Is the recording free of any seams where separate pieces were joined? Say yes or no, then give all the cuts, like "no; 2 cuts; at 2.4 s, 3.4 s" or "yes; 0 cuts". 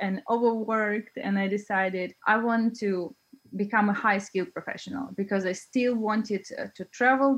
yes; 0 cuts